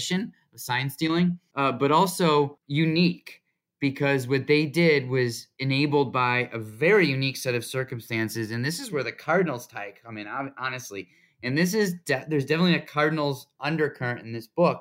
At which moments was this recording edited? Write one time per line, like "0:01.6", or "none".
0:01.5
0:02.6
0:05.5